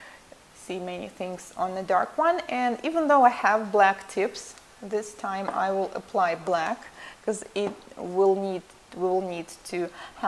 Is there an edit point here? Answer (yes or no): yes